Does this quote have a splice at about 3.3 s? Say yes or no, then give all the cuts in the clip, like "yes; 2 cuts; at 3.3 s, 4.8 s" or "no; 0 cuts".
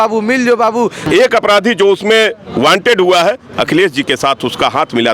no; 1 cut; at 1.0 s